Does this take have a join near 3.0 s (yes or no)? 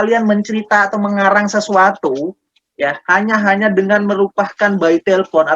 no